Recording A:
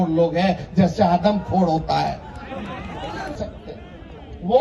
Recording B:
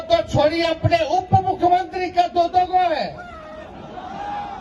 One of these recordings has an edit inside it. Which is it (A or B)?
A